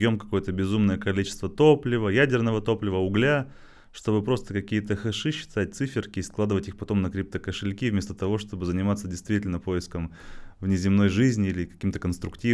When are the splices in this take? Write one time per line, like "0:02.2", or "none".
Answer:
none